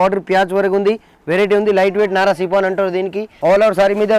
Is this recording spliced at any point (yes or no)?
yes